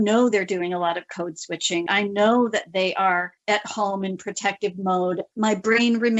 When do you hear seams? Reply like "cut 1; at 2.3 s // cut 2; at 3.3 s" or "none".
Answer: cut 1; at 1.8 s // cut 2; at 5.3 s